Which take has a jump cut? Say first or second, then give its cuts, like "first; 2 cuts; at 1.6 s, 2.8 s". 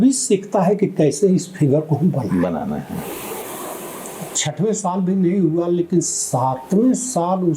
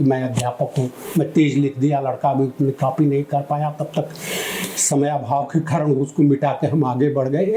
first; 1 cut; at 3.4 s